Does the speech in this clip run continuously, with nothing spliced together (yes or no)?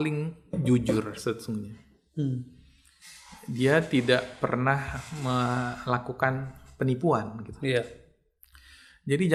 yes